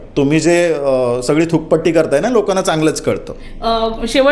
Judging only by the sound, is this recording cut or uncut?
uncut